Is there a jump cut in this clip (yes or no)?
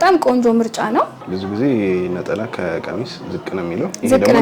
yes